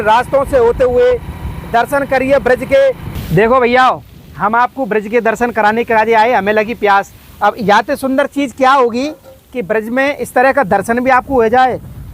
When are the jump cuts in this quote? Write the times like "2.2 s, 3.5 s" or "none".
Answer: 3.1 s